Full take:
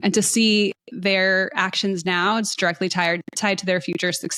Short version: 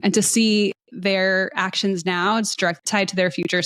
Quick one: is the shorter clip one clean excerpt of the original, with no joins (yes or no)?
no